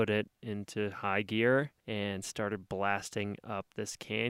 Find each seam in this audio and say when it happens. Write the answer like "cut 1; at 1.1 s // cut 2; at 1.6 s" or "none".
cut 1; at 1.8 s